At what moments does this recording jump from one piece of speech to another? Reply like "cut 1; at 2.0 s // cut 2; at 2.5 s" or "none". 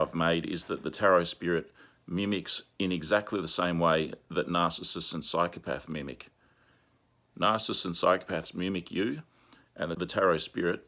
cut 1; at 10.0 s